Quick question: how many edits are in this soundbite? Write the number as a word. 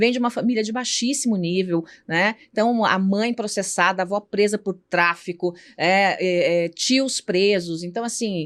zero